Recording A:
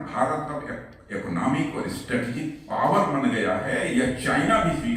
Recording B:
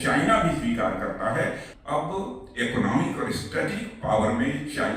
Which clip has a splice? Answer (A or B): B